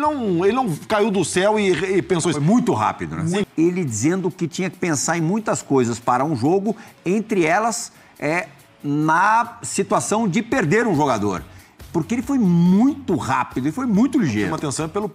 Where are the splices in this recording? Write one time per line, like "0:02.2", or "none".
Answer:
0:03.5